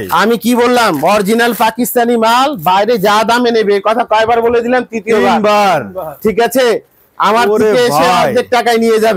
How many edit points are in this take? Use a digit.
0